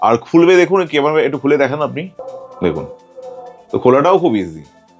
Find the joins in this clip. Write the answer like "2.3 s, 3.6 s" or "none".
none